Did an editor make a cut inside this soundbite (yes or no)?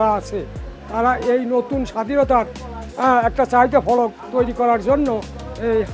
no